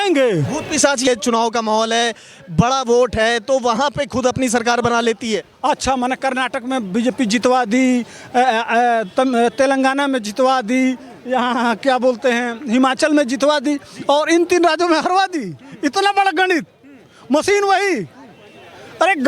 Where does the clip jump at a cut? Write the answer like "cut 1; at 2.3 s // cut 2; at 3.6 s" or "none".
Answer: cut 1; at 1.1 s